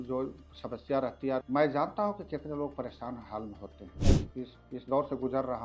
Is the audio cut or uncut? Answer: cut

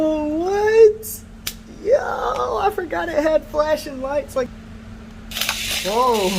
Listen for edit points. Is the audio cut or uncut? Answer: cut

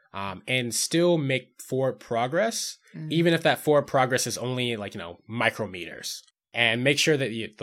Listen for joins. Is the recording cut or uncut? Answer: cut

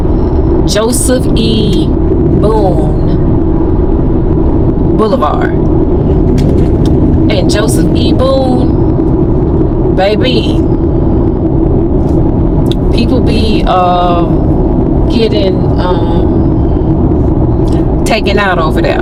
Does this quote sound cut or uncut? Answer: uncut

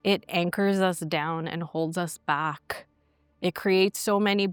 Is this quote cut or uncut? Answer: uncut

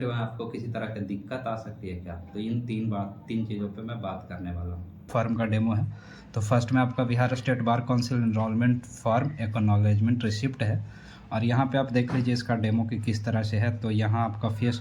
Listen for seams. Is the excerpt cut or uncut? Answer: cut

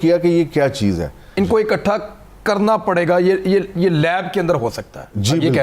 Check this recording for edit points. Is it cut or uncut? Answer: cut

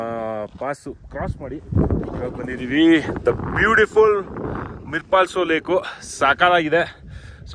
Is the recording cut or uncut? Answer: uncut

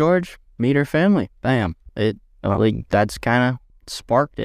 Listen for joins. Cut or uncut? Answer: uncut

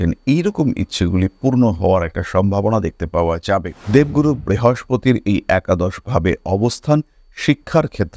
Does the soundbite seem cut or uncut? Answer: cut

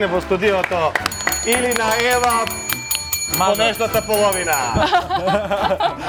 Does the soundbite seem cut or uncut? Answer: uncut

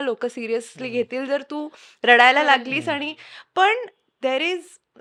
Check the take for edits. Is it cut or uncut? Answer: uncut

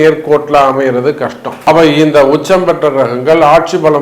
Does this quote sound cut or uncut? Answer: cut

